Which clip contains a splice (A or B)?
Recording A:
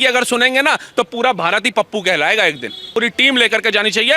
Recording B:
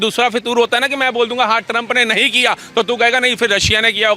A